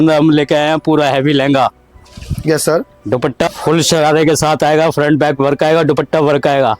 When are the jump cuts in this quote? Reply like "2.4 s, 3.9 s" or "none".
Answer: 3.5 s